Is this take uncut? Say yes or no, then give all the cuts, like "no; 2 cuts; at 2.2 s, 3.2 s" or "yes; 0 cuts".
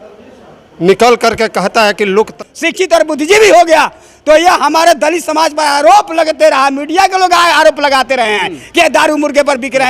no; 1 cut; at 2.3 s